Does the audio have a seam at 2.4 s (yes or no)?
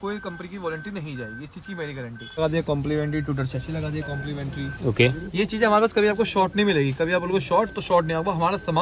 yes